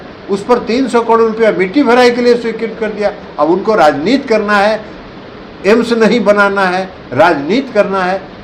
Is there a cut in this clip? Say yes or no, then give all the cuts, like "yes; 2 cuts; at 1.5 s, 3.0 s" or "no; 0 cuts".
no; 0 cuts